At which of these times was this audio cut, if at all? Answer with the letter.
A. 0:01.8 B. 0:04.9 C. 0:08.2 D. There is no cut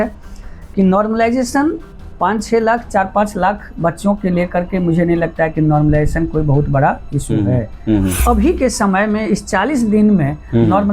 C